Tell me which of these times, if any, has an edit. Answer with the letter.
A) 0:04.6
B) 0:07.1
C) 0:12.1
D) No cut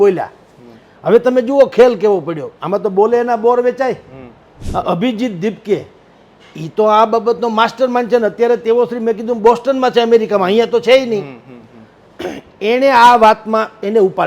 A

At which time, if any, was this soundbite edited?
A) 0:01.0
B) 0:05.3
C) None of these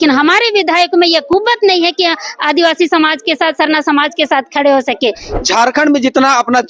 B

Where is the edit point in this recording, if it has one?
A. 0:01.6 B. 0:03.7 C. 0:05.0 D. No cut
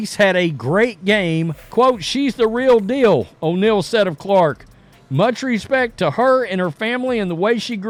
D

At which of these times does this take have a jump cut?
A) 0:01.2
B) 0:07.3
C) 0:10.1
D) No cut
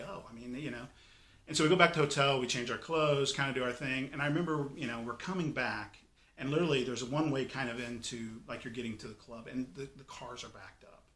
D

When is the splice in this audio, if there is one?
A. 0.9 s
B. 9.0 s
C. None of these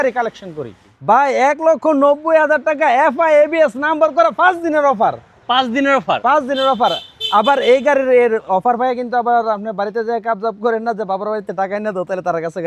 A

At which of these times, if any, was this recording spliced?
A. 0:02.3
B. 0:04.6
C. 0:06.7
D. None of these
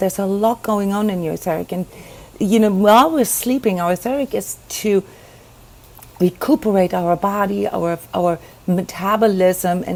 D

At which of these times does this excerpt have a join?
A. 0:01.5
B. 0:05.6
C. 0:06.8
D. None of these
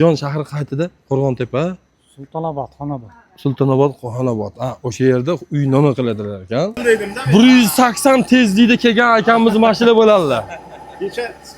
C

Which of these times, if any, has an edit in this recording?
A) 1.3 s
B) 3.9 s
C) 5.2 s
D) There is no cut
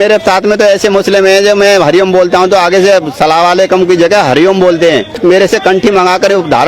C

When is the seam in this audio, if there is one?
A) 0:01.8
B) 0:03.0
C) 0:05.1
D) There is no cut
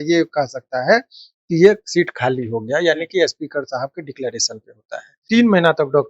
C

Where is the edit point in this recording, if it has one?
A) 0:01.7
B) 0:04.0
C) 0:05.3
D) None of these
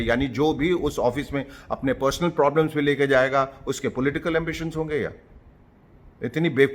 D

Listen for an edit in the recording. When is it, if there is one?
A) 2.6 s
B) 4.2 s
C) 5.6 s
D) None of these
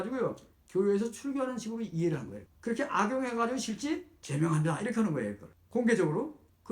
B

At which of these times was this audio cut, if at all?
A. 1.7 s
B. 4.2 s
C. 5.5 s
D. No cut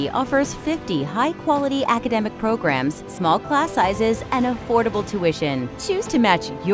D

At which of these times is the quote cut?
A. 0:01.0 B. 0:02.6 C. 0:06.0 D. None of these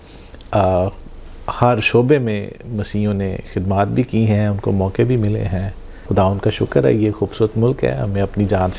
C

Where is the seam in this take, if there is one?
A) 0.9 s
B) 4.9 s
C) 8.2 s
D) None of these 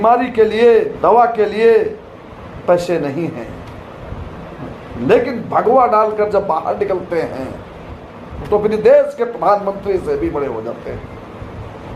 A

